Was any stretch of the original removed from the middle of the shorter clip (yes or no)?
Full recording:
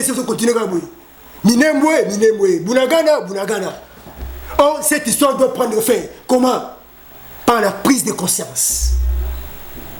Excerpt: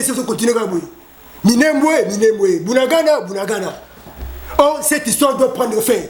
no